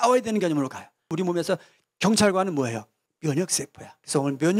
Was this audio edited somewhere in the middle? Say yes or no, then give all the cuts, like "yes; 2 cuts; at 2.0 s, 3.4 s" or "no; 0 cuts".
yes; 1 cut; at 1.1 s